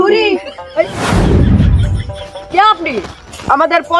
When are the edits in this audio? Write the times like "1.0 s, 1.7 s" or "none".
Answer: 0.9 s, 2.0 s